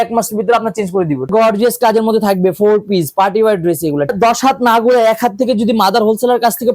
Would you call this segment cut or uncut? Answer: cut